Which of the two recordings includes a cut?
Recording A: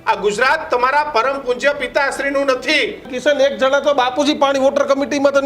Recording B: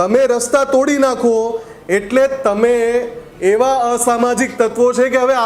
A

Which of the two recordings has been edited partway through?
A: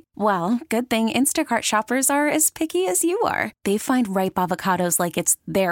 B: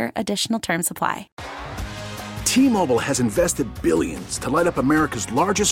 B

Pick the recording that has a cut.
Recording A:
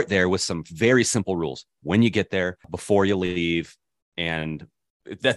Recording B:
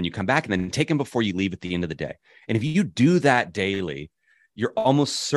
A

